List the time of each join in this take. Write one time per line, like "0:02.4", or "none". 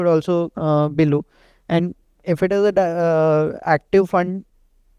none